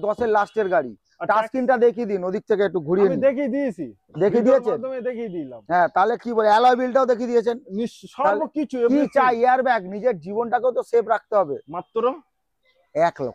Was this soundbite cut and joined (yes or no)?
no